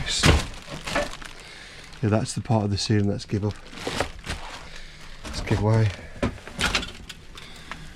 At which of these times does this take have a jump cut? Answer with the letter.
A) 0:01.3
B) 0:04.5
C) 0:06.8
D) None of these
D